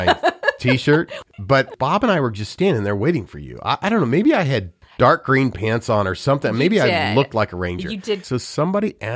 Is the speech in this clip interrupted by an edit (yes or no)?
yes